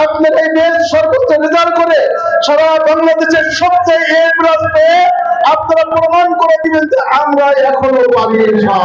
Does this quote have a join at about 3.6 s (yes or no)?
no